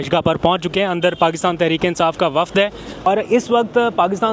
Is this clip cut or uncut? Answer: cut